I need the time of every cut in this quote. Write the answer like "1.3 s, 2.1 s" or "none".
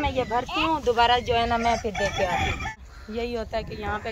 2.8 s